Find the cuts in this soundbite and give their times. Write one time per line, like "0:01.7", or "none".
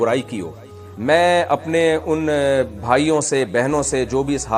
0:00.9